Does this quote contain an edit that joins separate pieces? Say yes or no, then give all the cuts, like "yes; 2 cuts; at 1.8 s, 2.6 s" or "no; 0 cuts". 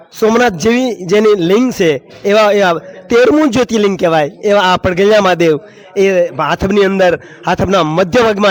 no; 0 cuts